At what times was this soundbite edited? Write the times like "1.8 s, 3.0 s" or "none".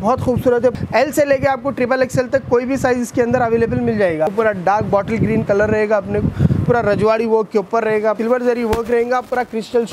0.7 s, 4.3 s, 8.2 s